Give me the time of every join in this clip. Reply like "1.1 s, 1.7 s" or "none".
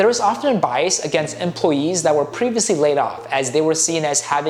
none